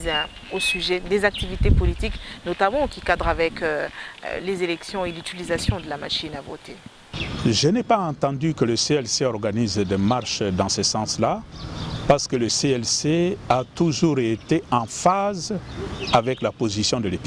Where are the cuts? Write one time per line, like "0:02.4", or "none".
0:07.1